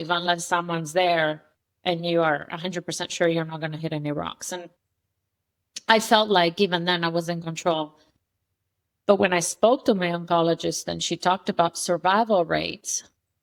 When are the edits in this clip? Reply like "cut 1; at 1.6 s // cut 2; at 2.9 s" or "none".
none